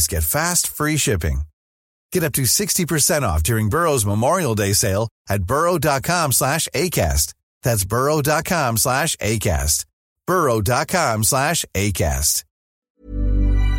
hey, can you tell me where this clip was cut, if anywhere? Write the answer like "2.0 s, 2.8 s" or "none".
12.8 s